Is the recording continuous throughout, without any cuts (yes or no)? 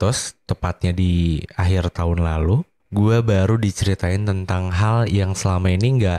no